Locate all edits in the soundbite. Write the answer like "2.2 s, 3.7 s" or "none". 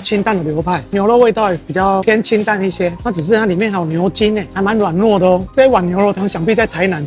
none